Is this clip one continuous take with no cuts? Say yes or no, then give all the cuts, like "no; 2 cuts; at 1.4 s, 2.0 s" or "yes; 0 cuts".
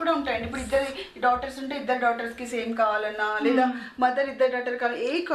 yes; 0 cuts